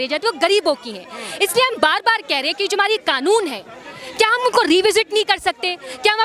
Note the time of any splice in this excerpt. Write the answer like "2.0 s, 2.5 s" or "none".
none

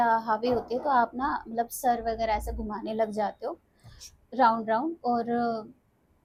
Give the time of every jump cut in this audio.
none

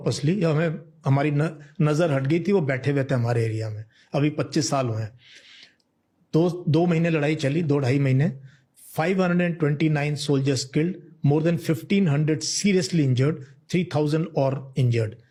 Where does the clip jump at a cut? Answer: none

